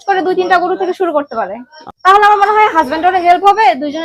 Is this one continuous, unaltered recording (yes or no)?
no